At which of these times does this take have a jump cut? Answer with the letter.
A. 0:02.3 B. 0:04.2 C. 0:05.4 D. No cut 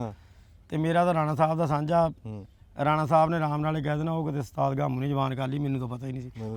D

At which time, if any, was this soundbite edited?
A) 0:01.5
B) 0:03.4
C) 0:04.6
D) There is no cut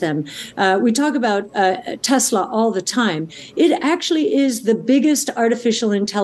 D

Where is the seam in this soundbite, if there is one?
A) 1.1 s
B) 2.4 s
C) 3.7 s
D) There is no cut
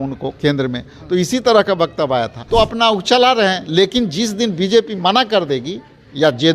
B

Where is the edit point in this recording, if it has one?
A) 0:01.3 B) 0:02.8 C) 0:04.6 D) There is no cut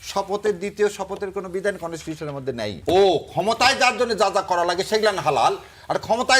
B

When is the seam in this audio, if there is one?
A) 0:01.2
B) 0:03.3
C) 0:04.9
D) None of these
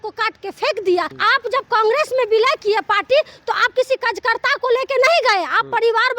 A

